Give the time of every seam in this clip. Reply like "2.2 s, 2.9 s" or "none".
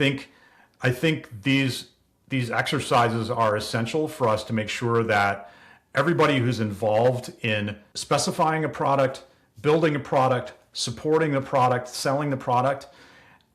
7.9 s